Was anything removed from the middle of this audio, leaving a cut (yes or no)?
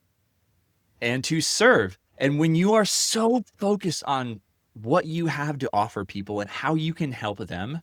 no